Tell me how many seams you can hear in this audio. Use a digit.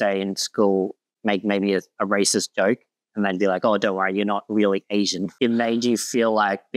0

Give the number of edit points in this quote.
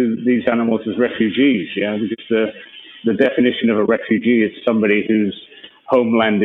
0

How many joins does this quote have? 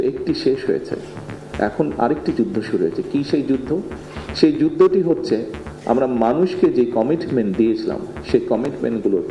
0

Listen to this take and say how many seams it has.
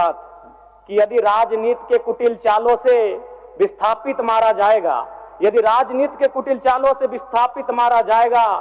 0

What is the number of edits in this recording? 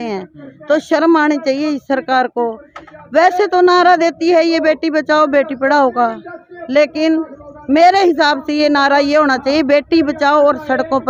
0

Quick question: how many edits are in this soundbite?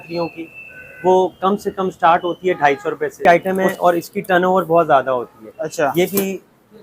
1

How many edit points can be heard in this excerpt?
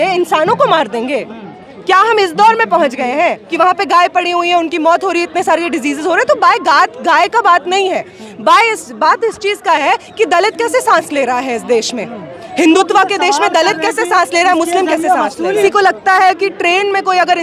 2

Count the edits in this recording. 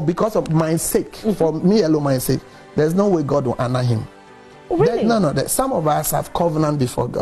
0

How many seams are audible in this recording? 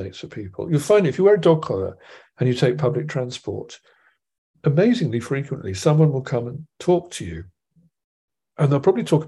0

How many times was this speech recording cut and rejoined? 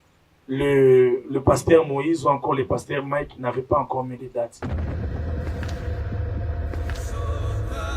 1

